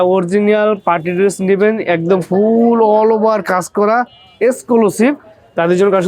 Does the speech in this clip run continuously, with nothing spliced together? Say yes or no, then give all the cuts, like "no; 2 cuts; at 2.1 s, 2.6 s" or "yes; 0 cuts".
yes; 0 cuts